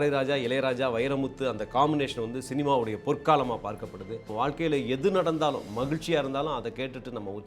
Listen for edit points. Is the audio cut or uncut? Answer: cut